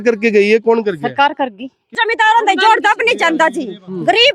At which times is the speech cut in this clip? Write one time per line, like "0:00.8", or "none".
0:01.9